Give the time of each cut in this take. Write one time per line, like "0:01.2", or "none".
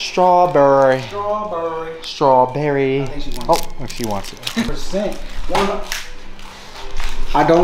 0:04.7